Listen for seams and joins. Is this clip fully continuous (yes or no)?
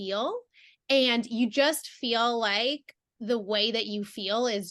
yes